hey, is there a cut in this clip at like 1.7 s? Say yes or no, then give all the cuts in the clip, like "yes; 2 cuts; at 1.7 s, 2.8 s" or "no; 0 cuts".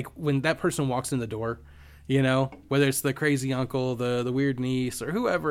no; 0 cuts